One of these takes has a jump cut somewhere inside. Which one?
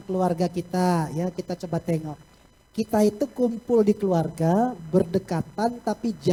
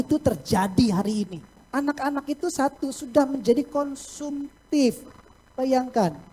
second; 1 cut; at 1.6 s

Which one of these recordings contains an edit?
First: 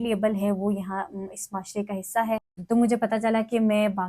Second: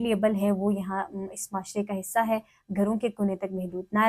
first; 1 cut; at 2.5 s

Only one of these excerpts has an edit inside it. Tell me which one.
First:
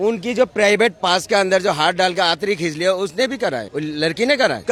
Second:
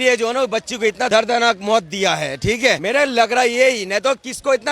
second; 2 cuts; at 1.1 s, 2.8 s

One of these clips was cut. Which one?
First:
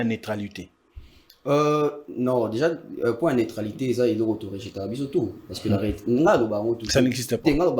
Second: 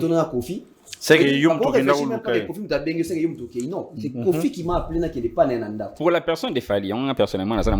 second; 1 cut; at 5.9 s

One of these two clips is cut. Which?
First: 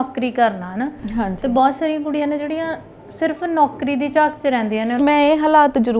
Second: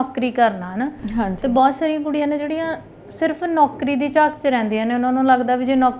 first; 1 cut; at 5.0 s

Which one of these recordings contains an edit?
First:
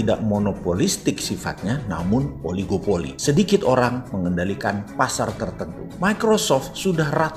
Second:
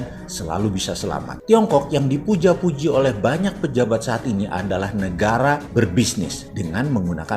second; 1 cut; at 1.3 s

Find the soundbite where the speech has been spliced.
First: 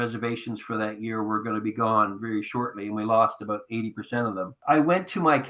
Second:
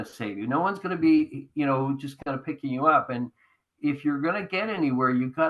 first; 1 cut; at 4.5 s

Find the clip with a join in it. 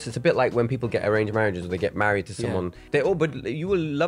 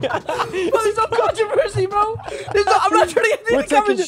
first; 1 cut; at 2.8 s

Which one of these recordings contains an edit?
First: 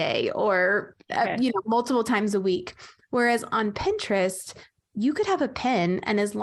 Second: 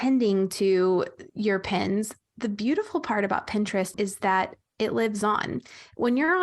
second; 1 cut; at 3.9 s

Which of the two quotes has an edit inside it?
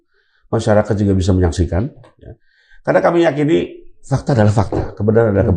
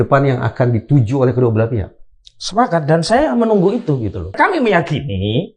second; 1 cut; at 4.4 s

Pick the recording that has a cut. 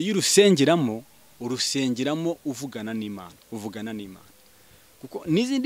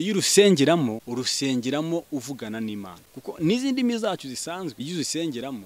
second; 3 cuts; at 1.0 s, 3.0 s, 4.8 s

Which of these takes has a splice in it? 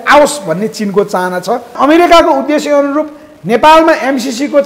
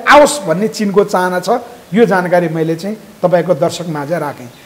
first; 1 cut; at 1.7 s

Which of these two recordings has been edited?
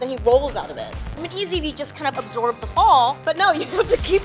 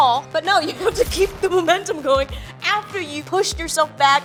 first; 1 cut; at 1.0 s

